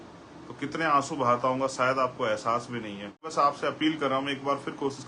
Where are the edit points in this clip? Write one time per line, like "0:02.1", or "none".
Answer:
0:03.3